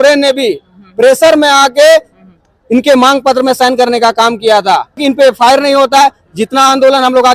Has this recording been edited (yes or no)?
yes